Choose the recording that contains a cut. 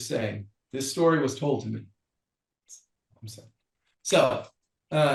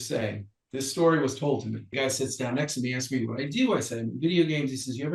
second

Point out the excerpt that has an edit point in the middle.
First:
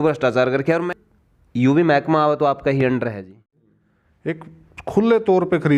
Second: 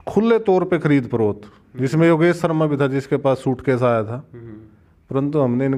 first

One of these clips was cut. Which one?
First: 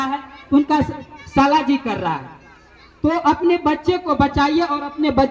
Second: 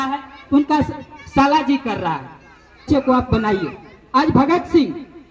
second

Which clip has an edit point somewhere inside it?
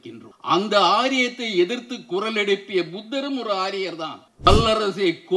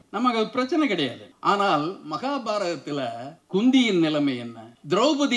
first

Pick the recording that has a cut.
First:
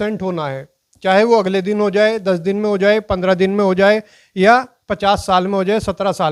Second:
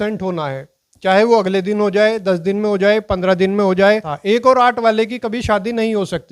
second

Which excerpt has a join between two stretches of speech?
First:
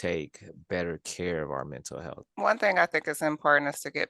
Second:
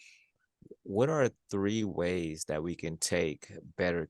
first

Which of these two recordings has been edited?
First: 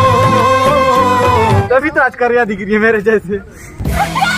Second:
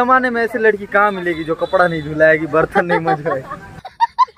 first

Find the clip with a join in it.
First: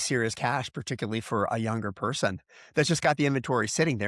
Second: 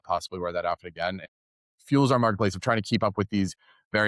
second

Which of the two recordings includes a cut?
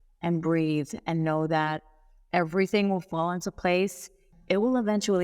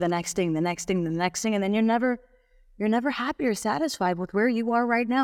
first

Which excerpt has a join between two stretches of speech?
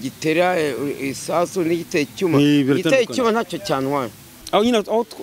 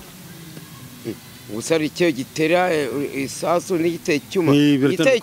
first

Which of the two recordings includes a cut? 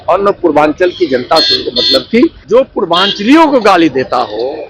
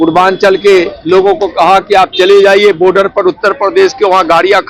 first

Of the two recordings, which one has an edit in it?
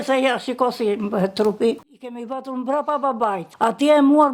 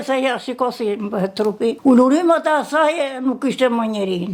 first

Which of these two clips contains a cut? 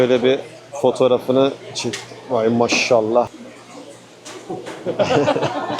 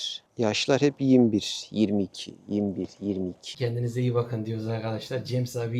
second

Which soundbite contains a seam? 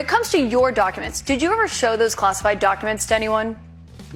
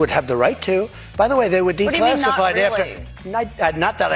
second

